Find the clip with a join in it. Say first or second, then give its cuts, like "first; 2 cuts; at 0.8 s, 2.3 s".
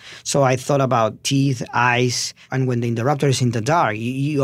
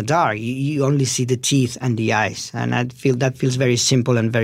first; 2 cuts; at 1.2 s, 2.4 s